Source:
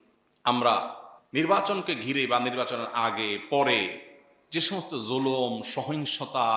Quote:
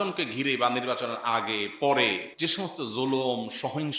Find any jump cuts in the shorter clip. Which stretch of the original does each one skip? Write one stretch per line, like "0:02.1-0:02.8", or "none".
0:04.0-0:04.4